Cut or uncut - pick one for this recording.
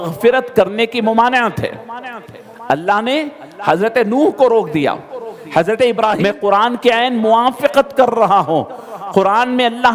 cut